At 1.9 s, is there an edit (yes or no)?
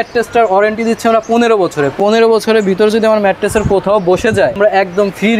yes